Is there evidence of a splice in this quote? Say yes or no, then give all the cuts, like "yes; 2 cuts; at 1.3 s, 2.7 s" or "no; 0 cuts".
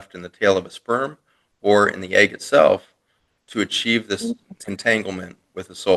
no; 0 cuts